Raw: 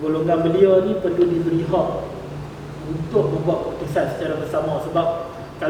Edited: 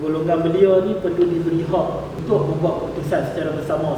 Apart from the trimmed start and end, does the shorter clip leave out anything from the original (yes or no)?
yes